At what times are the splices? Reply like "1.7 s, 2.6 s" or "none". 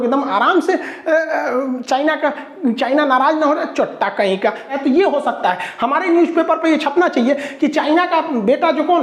4.7 s